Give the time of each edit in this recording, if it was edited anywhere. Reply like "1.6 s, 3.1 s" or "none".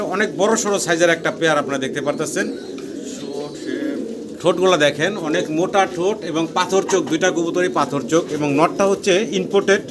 none